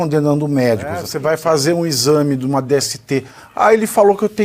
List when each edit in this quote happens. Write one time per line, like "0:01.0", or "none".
0:01.1